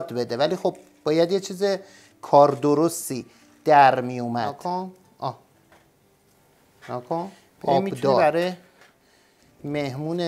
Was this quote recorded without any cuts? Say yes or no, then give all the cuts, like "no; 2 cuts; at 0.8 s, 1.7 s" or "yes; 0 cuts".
no; 2 cuts; at 4.6 s, 8.2 s